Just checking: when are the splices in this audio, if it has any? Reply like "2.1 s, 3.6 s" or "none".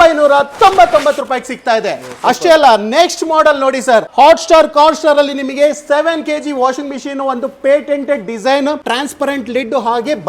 none